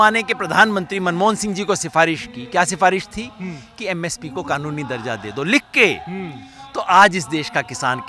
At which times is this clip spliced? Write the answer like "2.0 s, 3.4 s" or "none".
none